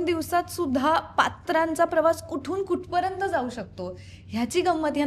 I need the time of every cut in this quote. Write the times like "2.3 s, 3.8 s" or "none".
none